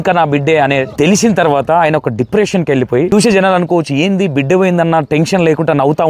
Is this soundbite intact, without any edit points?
no; 2 cuts; at 0.9 s, 3.1 s

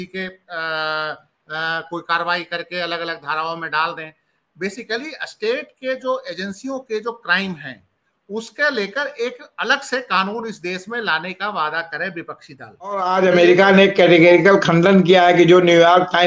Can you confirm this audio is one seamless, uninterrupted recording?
no; 1 cut; at 13.0 s

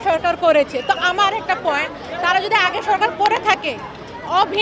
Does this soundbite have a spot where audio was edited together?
no; 0 cuts

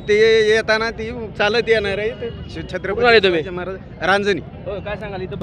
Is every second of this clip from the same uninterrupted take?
yes; 0 cuts

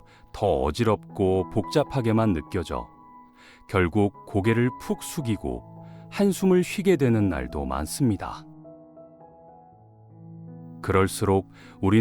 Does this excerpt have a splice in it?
yes; 2 cuts; at 8.5 s, 10.8 s

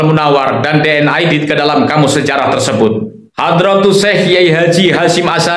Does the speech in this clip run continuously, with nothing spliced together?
no; 1 cut; at 3.2 s

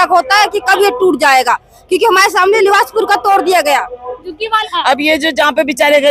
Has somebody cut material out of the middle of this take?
yes; 1 cut; at 4.6 s

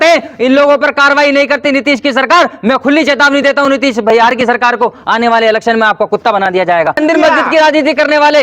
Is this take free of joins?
no; 1 cut; at 7.0 s

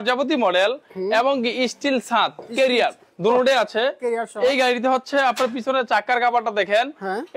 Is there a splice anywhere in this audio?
no; 0 cuts

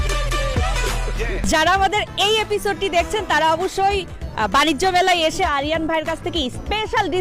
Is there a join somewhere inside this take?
yes; 2 cuts; at 1.4 s, 5.4 s

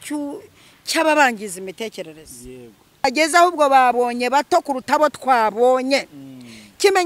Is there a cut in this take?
yes; 1 cut; at 3.1 s

